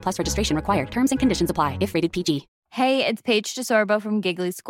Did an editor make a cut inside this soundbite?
yes; 1 cut; at 2.6 s

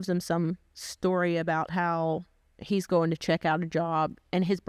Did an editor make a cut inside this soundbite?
no; 0 cuts

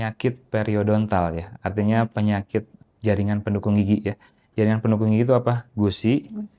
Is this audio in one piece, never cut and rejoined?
no; 2 cuts; at 2.8 s, 5.7 s

